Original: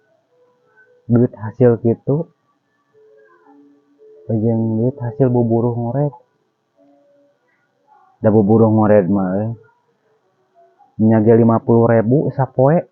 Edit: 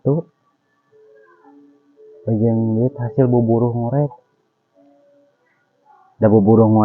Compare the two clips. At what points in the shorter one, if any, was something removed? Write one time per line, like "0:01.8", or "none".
none